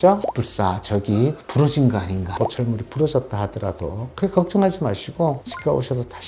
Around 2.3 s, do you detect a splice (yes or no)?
yes